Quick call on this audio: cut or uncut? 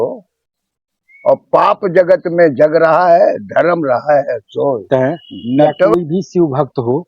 cut